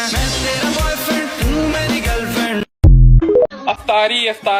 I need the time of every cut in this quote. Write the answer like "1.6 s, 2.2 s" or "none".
3.6 s